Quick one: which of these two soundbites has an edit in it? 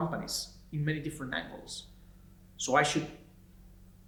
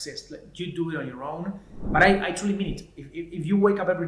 second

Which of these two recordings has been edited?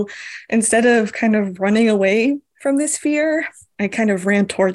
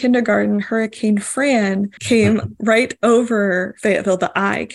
second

